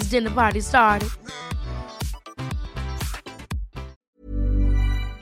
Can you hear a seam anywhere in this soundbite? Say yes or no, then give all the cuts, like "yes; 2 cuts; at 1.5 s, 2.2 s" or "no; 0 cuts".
yes; 1 cut; at 3.9 s